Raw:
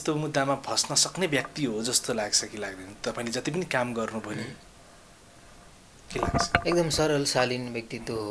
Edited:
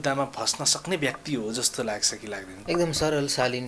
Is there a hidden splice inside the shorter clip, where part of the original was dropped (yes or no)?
yes